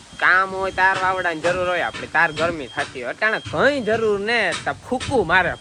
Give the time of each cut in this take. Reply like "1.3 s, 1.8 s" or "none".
none